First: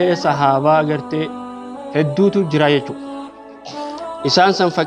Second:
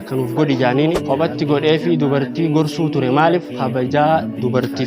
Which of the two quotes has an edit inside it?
second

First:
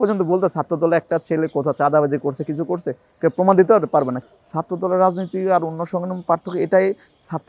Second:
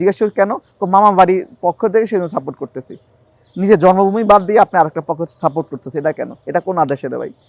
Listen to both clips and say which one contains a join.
first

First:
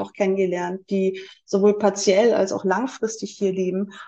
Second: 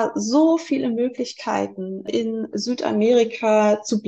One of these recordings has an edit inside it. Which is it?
second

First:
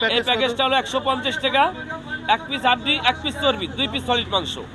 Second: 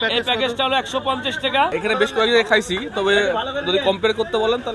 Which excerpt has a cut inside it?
second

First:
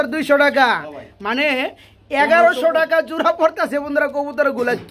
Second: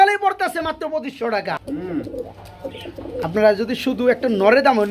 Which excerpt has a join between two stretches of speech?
second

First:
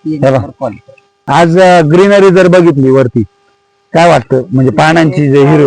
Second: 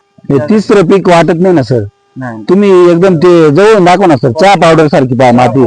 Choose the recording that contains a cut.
first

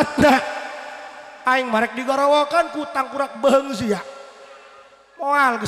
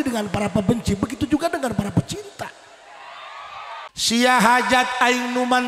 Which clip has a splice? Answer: second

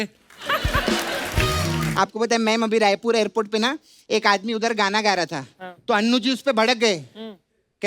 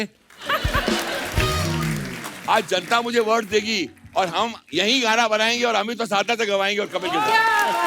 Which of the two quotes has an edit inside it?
first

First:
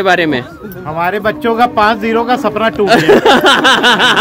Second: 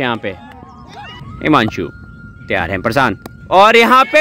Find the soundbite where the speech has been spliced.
second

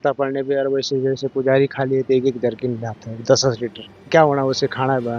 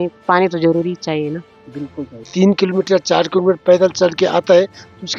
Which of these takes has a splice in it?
second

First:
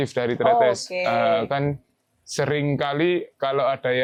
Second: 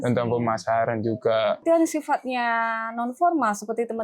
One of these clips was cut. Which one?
second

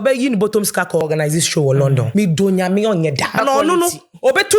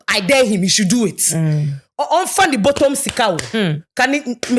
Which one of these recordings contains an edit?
first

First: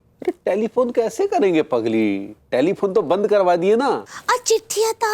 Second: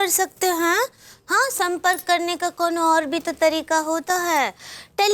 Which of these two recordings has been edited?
first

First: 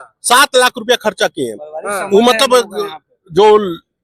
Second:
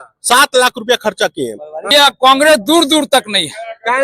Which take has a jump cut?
second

